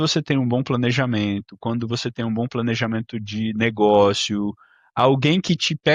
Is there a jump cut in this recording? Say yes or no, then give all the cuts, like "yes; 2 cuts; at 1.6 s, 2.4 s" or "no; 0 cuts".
no; 0 cuts